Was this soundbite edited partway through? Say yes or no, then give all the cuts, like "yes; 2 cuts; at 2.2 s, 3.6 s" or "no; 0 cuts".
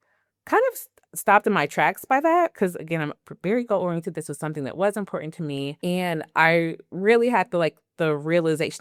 no; 0 cuts